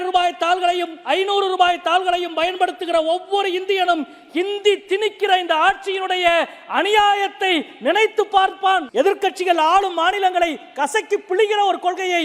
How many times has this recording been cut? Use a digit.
1